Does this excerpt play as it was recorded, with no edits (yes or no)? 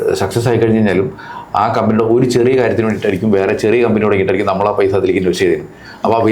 yes